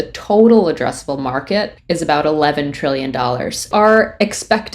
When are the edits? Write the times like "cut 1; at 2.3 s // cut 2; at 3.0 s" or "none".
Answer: cut 1; at 1.8 s // cut 2; at 3.7 s